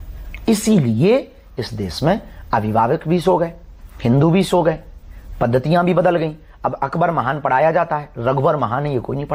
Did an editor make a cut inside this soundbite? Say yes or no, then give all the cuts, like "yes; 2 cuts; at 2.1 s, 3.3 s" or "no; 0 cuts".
no; 0 cuts